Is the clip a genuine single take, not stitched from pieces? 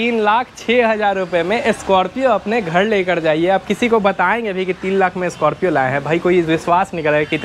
yes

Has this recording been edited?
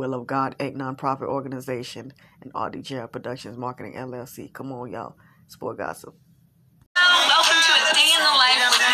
yes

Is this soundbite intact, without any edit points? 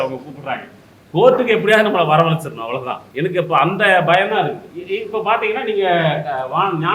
no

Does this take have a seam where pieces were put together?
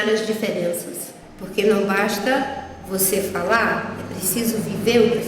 yes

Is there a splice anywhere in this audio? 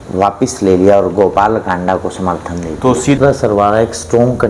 yes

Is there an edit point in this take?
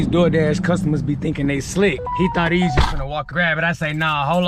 yes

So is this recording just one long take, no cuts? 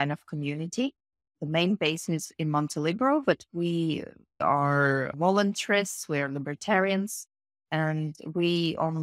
yes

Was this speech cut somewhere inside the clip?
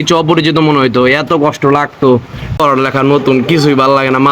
yes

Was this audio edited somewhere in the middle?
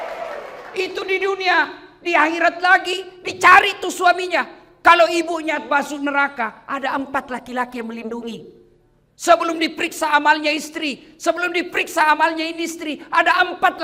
no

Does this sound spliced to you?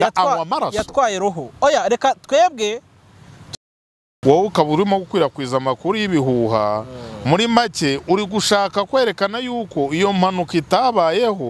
yes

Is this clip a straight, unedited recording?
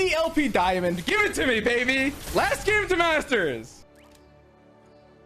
no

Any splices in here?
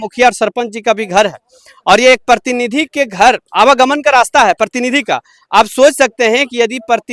no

